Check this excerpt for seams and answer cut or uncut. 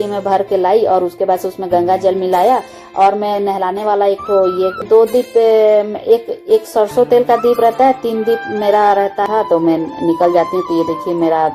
cut